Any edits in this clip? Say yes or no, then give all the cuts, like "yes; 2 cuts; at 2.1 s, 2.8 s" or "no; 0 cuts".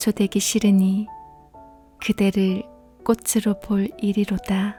no; 0 cuts